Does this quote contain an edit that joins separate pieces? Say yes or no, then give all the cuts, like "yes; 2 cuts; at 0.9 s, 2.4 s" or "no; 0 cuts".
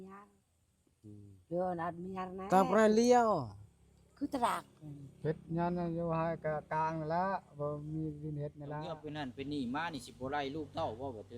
yes; 1 cut; at 8.9 s